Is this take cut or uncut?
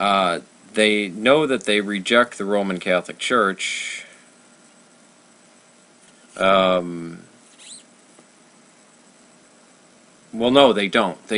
uncut